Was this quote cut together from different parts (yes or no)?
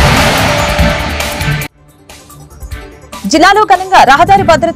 yes